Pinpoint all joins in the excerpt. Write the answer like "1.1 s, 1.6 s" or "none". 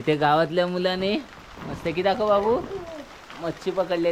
none